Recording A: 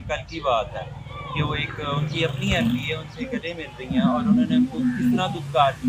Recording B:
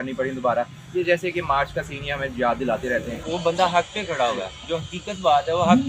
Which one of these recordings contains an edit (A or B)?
B